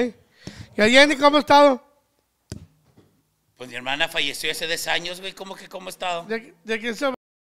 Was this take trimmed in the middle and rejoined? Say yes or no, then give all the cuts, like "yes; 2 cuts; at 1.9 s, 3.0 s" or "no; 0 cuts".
no; 0 cuts